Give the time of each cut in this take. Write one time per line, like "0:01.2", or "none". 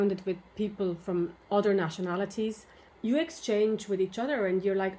0:01.4
0:02.9